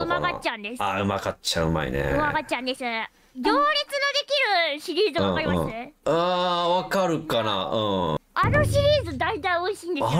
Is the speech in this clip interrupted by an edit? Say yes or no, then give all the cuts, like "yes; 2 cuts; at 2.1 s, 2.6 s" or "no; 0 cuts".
yes; 2 cuts; at 3.2 s, 8.2 s